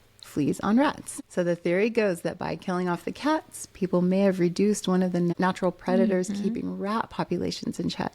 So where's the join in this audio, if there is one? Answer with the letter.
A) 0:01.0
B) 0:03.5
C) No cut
A